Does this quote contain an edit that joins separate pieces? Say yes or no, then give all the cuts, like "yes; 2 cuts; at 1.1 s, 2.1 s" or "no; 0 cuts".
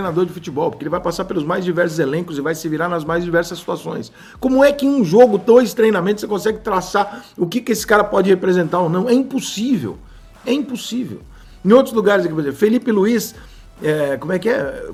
no; 0 cuts